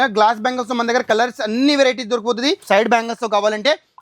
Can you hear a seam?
yes; 1 cut; at 2.6 s

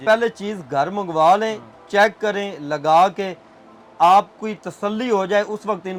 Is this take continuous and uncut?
yes; 0 cuts

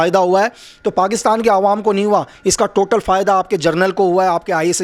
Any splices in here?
no; 0 cuts

